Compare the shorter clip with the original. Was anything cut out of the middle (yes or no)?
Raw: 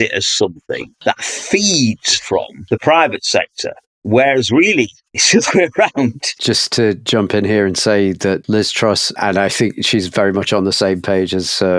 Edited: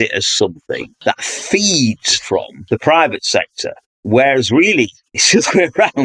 no